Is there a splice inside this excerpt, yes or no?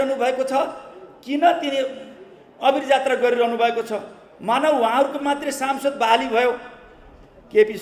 no